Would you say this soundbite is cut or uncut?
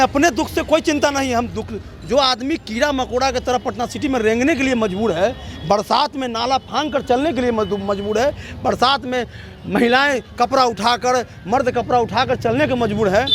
uncut